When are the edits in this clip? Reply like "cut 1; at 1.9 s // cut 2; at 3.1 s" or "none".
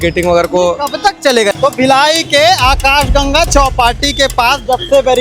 cut 1; at 1.5 s